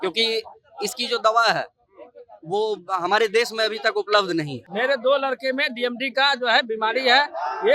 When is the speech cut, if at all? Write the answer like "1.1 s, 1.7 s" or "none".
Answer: 4.6 s